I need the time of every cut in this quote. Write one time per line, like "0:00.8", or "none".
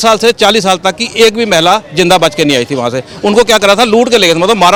none